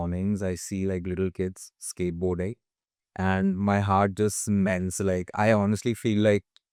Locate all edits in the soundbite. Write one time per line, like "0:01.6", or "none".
none